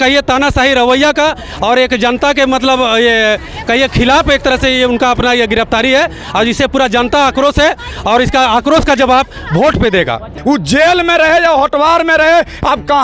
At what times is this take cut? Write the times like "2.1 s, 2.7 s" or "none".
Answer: 10.3 s